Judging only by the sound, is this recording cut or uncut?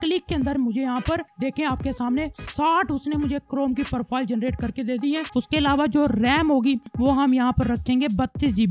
cut